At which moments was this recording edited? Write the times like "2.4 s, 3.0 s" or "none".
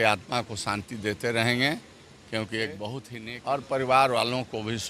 3.1 s